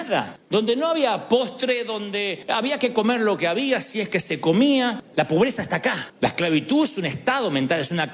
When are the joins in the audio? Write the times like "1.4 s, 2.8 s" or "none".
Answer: 5.0 s, 6.1 s